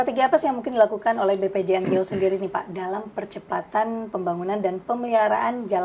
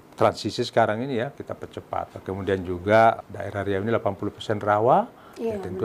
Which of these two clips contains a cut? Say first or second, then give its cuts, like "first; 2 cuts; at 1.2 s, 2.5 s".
second; 2 cuts; at 2.1 s, 3.2 s